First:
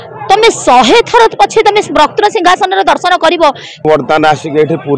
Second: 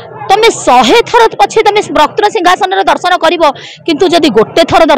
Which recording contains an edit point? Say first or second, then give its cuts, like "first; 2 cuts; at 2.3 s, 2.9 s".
first; 1 cut; at 3.8 s